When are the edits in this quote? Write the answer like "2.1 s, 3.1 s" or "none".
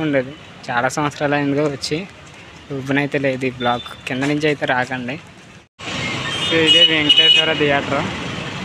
5.8 s